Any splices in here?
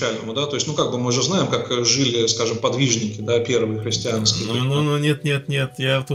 no; 0 cuts

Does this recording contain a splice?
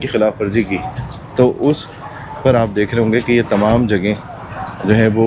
no; 0 cuts

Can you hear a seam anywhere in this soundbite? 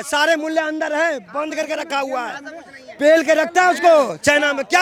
no; 0 cuts

